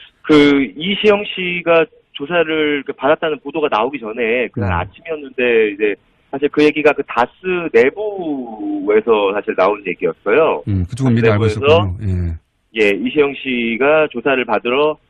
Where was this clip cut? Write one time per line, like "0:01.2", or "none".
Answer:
0:10.9